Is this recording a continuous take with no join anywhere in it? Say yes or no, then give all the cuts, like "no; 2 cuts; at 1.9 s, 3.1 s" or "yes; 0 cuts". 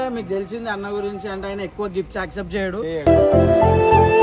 yes; 0 cuts